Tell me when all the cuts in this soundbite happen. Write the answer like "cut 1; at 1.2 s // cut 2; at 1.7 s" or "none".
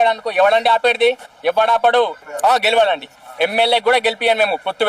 cut 1; at 2.2 s